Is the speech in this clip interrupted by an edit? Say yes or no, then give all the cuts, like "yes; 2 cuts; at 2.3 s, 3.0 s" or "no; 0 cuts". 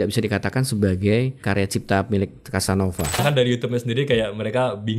yes; 2 cuts; at 1.4 s, 3.2 s